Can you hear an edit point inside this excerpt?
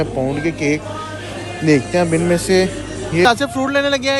yes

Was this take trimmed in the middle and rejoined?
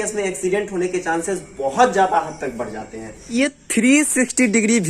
yes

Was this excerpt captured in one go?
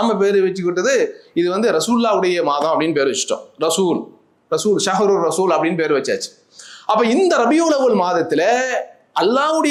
yes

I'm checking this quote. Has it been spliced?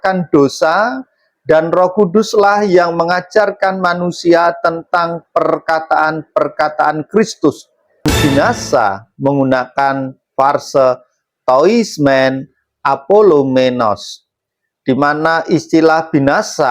yes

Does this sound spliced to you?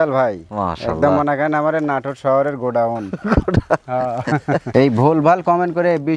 yes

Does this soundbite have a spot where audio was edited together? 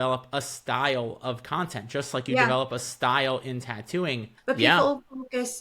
yes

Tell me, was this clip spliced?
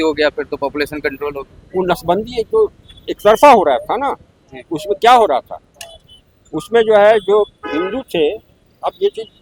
no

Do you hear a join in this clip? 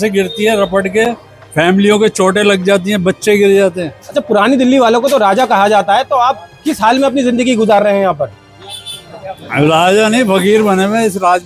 no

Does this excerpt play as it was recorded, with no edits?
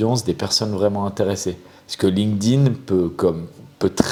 yes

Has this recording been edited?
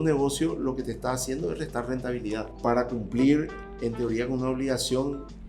yes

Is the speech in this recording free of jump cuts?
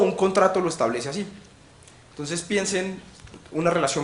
no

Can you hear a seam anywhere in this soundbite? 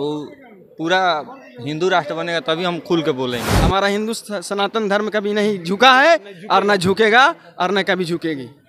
yes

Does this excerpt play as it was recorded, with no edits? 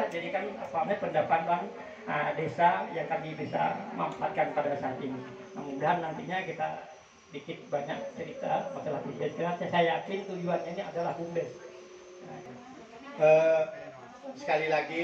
no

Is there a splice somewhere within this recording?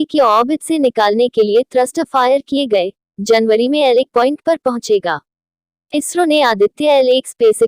yes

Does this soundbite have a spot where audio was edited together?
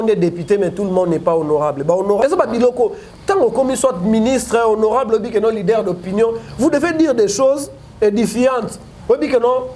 yes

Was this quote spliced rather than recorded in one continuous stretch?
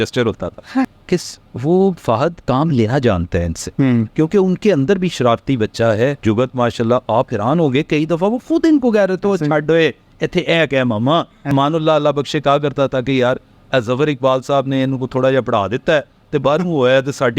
yes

